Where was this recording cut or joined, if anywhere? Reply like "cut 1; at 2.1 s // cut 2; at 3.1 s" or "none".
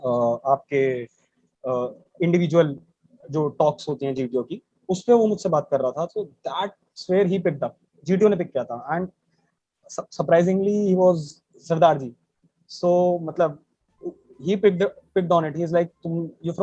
none